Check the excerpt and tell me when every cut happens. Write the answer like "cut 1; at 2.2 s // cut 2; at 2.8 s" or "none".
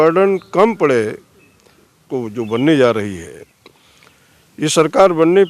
cut 1; at 2.0 s